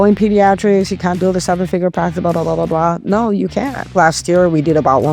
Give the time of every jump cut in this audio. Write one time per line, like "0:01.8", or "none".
0:01.2
0:03.9

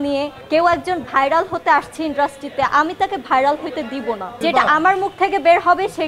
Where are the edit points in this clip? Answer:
0:04.4

